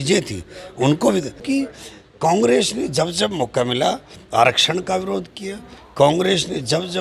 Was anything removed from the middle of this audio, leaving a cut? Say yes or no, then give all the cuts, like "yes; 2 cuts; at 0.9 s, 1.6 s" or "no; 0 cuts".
yes; 1 cut; at 1.4 s